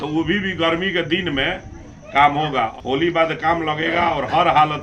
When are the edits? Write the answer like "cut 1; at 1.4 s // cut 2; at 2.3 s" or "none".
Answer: cut 1; at 2.7 s